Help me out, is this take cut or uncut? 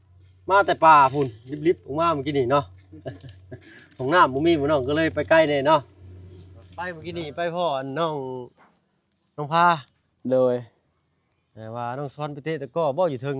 cut